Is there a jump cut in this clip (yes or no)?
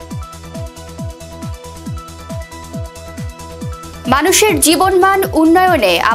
no